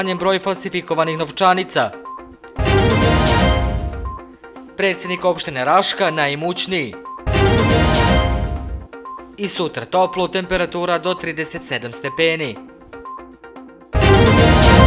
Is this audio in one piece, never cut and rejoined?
no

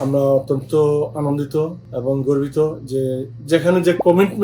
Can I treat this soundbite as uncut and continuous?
no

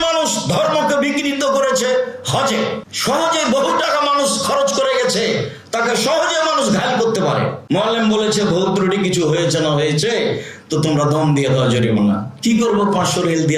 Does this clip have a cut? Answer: yes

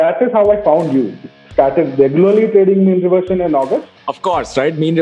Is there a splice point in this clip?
yes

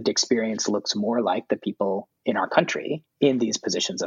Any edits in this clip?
yes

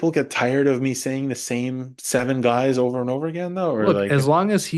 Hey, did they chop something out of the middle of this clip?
no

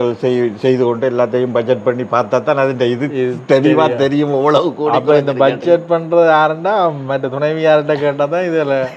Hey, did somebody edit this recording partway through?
no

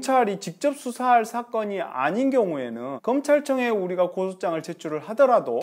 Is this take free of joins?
yes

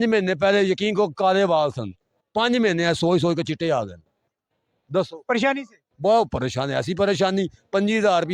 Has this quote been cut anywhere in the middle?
no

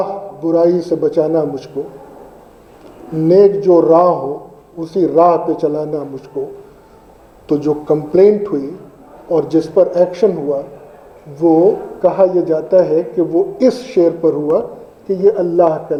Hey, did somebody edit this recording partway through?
no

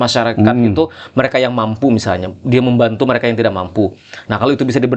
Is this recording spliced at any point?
no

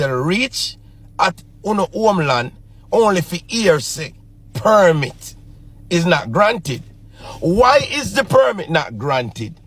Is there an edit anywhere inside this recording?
no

